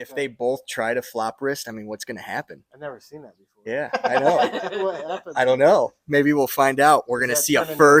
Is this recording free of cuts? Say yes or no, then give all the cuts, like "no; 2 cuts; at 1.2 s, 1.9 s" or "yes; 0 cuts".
yes; 0 cuts